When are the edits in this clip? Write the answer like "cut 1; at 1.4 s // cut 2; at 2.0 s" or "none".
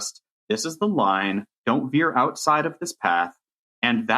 cut 1; at 1.6 s